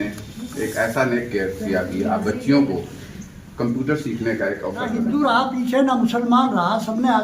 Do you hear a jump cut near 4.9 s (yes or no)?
yes